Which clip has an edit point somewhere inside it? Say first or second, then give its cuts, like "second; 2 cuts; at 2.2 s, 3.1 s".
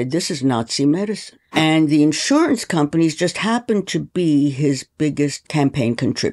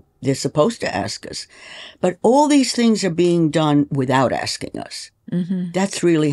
first; 2 cuts; at 1.3 s, 5.4 s